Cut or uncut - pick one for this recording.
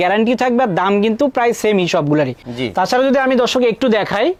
uncut